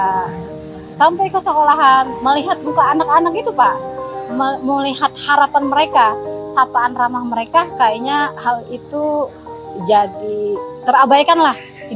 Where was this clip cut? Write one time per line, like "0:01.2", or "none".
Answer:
none